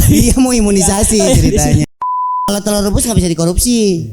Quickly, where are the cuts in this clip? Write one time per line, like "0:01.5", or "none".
0:02.5